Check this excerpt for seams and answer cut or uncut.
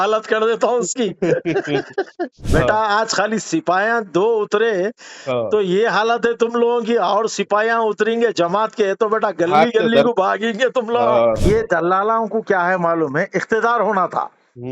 cut